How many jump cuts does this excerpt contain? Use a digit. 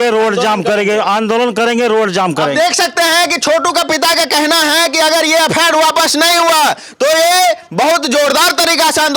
0